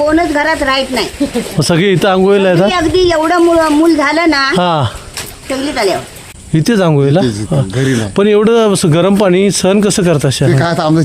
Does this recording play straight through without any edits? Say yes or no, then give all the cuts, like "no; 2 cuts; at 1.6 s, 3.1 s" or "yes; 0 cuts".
no; 1 cut; at 6.3 s